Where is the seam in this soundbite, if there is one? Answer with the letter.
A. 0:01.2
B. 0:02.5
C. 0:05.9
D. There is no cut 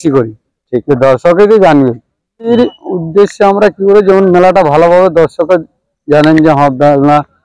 B